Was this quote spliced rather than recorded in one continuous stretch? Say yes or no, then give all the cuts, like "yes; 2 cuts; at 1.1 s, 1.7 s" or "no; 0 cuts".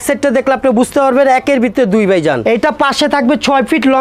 yes; 1 cut; at 2.4 s